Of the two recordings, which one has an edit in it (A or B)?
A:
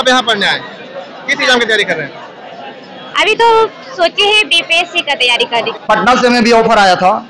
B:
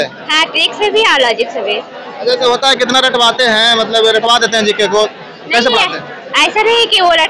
A